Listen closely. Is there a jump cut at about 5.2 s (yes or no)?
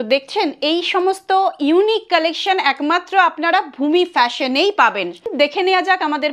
no